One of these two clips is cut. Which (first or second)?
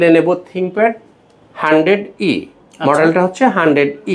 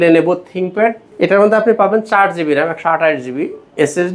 second